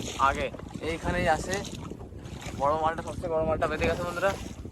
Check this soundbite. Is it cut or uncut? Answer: uncut